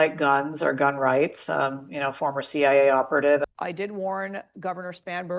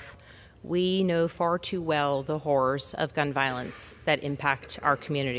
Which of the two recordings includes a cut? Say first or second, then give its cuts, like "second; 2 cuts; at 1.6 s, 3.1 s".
first; 1 cut; at 3.4 s